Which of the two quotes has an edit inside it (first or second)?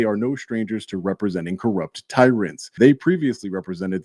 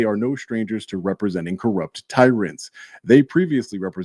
first